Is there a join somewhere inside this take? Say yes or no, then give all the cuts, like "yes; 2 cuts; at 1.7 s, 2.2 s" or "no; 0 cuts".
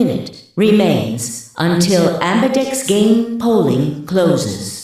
no; 0 cuts